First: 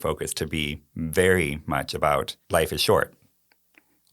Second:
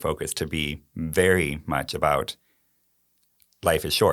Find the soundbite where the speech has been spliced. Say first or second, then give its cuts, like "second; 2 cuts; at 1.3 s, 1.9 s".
first; 1 cut; at 2.4 s